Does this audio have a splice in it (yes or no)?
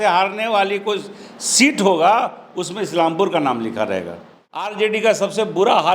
yes